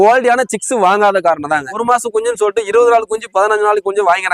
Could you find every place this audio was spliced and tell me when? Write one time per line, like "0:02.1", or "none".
0:01.8